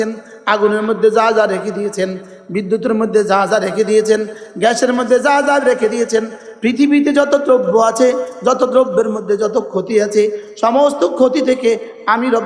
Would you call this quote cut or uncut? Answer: uncut